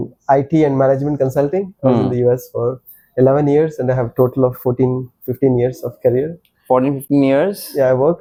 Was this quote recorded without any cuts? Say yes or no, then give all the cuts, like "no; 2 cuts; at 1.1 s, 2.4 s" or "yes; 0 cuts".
yes; 0 cuts